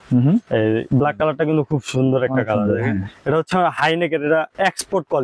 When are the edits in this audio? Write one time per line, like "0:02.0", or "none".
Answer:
none